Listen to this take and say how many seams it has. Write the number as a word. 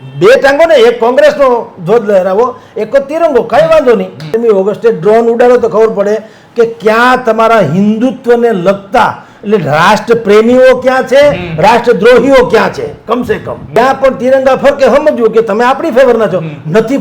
two